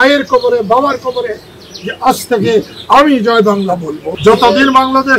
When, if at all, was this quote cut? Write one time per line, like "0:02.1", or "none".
0:04.0

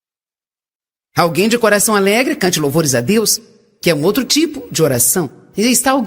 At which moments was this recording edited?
none

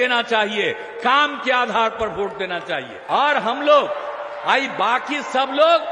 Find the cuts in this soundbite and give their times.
0:02.9

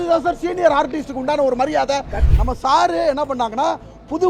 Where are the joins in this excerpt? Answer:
0:02.2

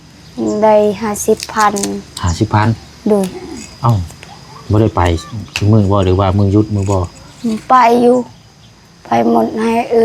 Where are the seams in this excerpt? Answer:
none

